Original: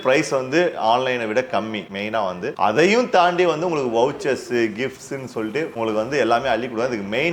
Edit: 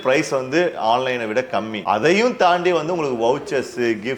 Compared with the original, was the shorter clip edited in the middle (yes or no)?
yes